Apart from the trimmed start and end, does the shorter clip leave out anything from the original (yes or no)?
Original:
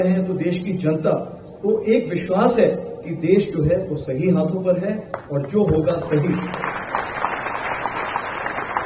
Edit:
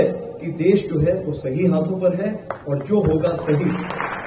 no